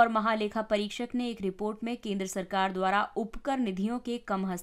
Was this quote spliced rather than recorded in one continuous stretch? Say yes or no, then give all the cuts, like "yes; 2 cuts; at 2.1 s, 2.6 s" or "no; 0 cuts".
no; 0 cuts